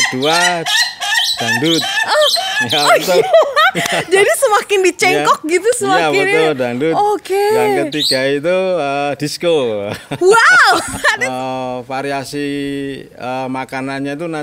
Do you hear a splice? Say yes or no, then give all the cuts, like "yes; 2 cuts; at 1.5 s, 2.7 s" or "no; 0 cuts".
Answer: yes; 1 cut; at 11.2 s